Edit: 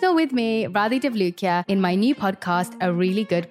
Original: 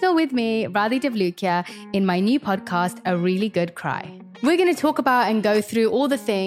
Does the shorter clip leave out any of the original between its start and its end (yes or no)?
yes